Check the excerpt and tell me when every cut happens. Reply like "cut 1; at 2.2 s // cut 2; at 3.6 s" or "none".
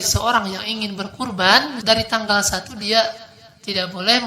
cut 1; at 1.8 s

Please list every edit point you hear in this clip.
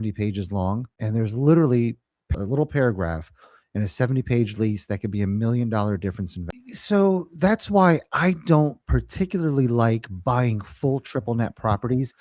cut 1; at 0.9 s // cut 2; at 2.3 s // cut 3; at 6.4 s

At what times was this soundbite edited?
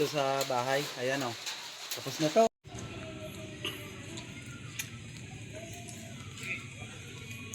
cut 1; at 2.5 s

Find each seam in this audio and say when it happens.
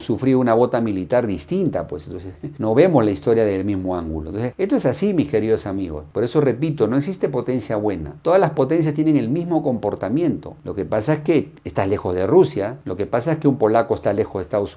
none

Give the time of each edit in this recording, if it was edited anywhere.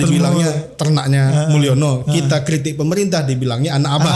none

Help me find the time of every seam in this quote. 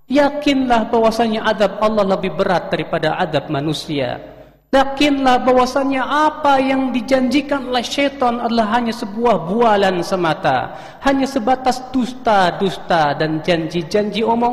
none

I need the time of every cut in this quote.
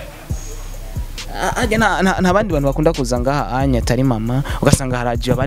none

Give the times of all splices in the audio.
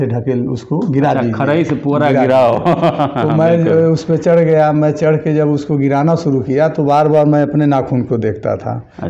none

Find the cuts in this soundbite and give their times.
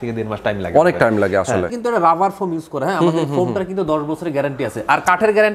cut 1; at 1.8 s

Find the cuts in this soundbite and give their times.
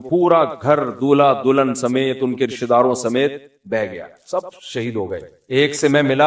cut 1; at 5.3 s

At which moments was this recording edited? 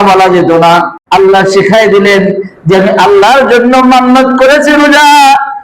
cut 1; at 1.0 s

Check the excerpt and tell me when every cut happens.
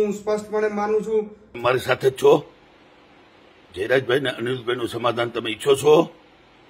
cut 1; at 1.4 s

